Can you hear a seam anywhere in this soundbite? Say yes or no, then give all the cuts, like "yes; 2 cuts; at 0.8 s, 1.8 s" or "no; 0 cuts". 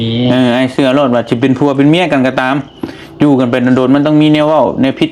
no; 0 cuts